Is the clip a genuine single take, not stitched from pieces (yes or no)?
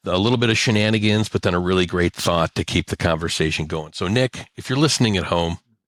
yes